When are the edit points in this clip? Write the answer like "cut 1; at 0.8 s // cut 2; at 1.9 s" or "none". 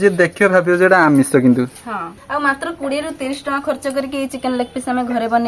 cut 1; at 2.1 s